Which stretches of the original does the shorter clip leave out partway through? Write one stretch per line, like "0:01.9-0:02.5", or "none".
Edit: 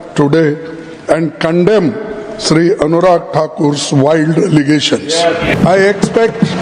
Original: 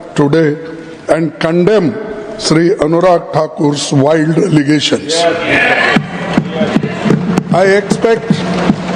0:05.6-0:07.4